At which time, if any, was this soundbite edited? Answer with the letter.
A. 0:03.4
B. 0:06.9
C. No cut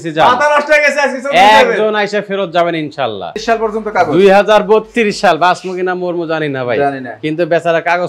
A